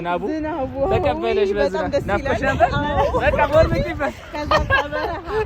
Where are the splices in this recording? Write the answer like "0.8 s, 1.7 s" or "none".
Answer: none